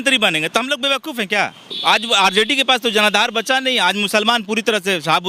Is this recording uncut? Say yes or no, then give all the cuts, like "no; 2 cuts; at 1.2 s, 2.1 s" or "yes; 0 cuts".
no; 1 cut; at 1.8 s